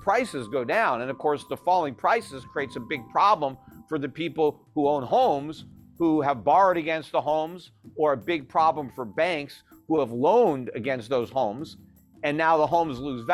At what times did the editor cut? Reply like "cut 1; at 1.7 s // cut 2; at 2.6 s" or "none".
none